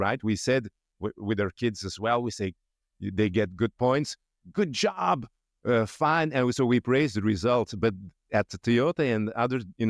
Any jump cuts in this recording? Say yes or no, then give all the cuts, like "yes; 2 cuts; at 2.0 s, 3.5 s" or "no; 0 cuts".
no; 0 cuts